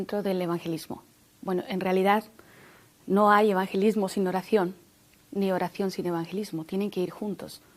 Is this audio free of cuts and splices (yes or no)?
no